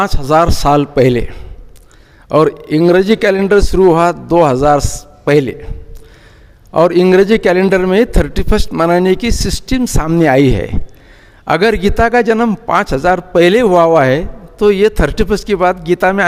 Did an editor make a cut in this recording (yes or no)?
no